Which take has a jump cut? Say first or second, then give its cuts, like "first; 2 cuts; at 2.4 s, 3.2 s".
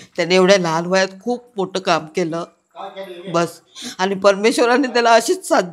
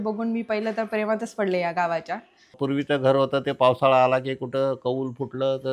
second; 1 cut; at 2.6 s